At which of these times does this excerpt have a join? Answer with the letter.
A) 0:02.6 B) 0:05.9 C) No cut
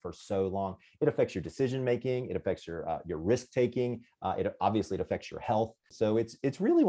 B